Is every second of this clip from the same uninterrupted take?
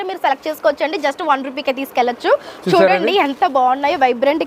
yes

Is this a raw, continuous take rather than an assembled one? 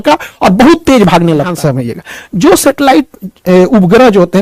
no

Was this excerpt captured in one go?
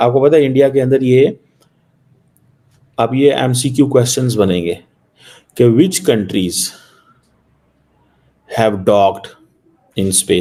yes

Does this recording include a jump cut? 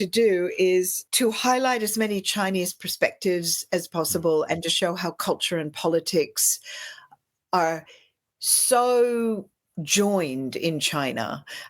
yes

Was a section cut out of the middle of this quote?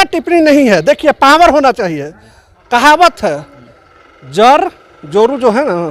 no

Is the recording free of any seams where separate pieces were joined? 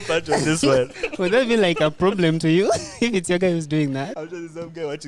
no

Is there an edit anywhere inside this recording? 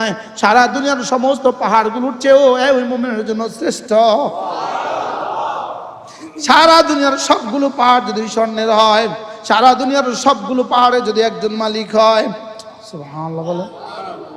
no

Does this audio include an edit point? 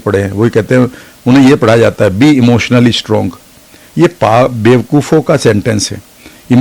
no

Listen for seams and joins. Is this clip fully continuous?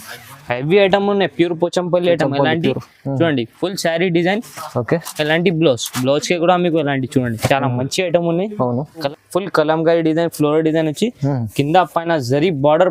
no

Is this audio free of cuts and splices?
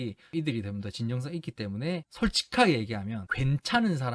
no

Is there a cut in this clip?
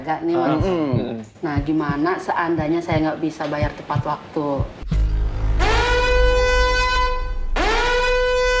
no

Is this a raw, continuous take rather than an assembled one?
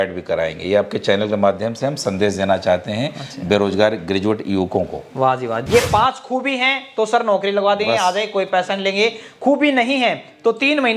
no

